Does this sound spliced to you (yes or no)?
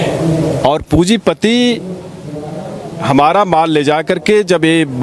no